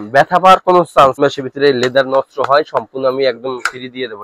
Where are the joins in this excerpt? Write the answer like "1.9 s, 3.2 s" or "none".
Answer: 1.2 s